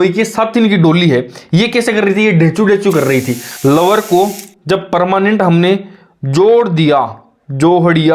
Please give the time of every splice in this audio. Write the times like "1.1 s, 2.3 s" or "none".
3.4 s